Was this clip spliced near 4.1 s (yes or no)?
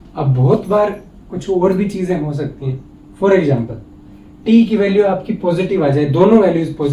no